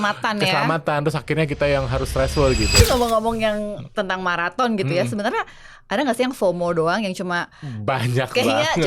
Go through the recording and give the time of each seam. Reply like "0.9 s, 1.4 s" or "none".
2.8 s